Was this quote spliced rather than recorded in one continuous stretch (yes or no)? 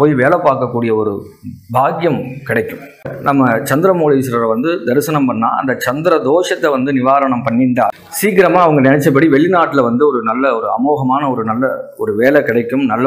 yes